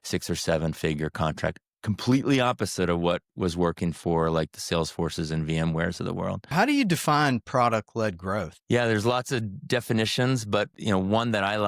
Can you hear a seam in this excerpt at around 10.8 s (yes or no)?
yes